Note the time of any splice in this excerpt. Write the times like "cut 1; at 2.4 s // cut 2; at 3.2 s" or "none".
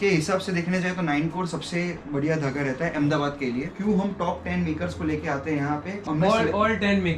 cut 1; at 3.7 s // cut 2; at 6.0 s